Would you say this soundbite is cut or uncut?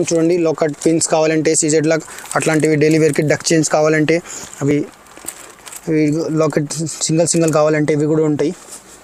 uncut